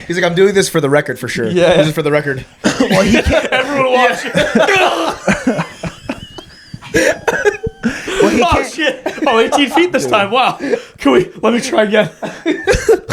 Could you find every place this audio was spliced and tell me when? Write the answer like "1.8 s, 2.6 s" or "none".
none